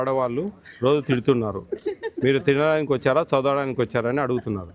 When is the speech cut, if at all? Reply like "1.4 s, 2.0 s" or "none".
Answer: none